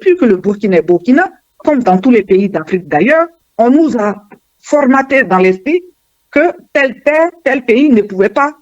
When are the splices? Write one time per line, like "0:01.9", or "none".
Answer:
0:01.4
0:03.5